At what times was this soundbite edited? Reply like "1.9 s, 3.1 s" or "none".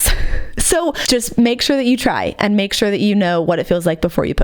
1.0 s

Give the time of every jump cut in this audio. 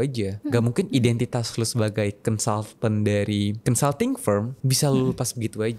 3.6 s, 4.6 s

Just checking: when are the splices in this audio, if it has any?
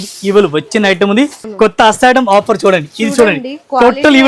1.4 s

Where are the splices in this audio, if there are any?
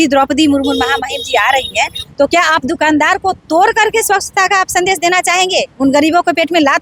none

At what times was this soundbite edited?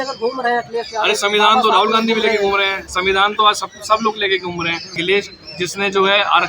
4.9 s

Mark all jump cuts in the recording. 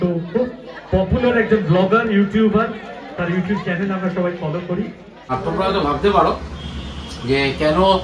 5.3 s

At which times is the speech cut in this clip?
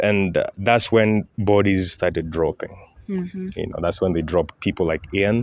none

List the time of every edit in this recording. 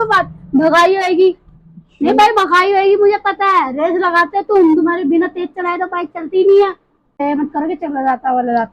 7.2 s

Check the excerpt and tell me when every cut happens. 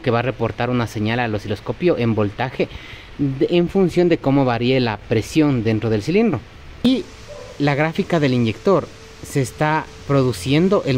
6.8 s

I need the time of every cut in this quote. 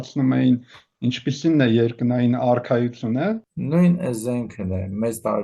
3.5 s

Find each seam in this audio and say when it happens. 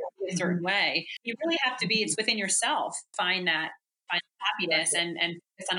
1.2 s

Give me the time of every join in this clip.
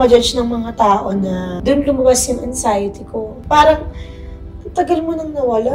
1.5 s, 3.3 s

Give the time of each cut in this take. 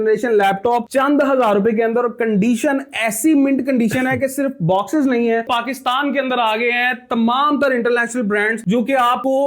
5.4 s

